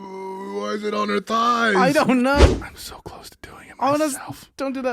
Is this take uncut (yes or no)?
no